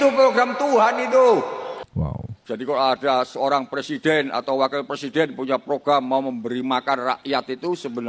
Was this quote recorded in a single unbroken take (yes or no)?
yes